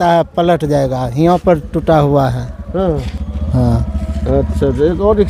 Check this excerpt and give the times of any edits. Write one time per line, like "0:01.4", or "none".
none